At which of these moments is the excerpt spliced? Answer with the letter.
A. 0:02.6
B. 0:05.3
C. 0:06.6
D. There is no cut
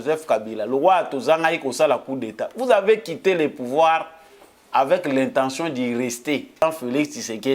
C